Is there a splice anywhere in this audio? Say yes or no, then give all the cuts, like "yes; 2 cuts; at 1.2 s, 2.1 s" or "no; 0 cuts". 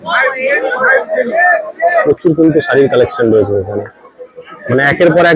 yes; 1 cut; at 2.0 s